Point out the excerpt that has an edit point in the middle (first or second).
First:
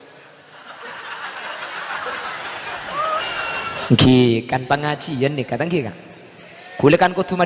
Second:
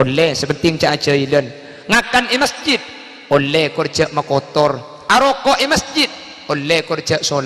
first